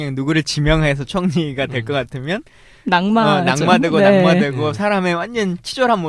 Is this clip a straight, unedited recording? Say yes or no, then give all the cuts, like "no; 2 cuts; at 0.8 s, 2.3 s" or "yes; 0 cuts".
yes; 0 cuts